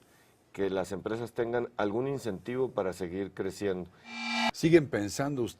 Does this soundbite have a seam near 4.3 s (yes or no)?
yes